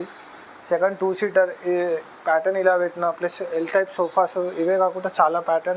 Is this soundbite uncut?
yes; 0 cuts

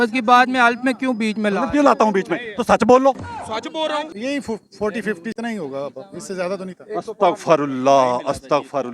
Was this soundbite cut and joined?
yes; 2 cuts; at 4.1 s, 5.3 s

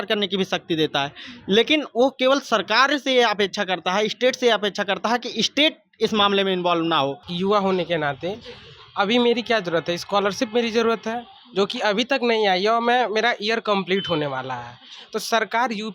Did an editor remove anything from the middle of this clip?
yes; 1 cut; at 7.3 s

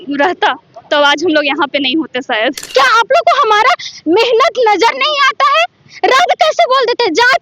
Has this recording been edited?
yes; 1 cut; at 2.6 s

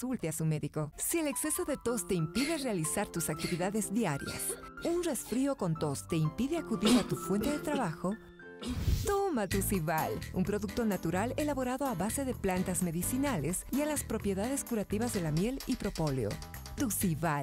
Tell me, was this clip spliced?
yes; 1 cut; at 0.9 s

